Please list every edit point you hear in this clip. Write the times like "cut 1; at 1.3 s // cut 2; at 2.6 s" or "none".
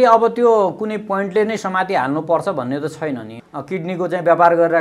cut 1; at 3.4 s